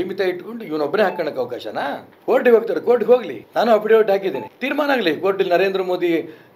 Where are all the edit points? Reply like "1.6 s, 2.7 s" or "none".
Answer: 2.1 s, 3.4 s, 4.5 s

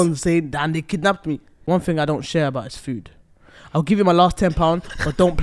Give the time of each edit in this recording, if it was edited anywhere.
1.5 s

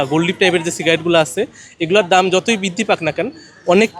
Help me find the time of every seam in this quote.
none

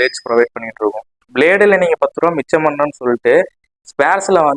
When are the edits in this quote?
1.3 s

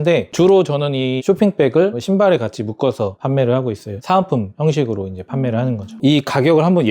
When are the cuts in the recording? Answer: 5.9 s

